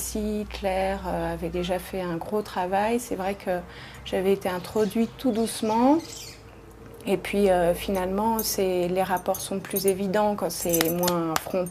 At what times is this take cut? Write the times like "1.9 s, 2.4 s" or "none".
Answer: 9.9 s